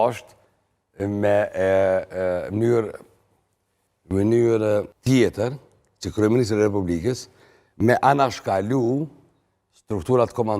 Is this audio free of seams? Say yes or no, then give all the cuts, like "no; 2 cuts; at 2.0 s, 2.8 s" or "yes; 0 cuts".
no; 1 cut; at 4.9 s